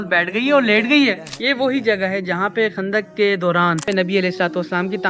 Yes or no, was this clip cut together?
yes